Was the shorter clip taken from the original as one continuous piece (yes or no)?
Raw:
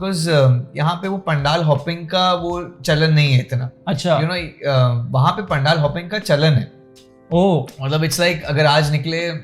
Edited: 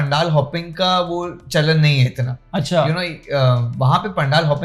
yes